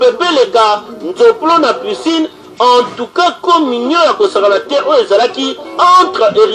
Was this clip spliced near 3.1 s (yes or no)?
no